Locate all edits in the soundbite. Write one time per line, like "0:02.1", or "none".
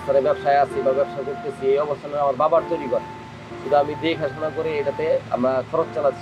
none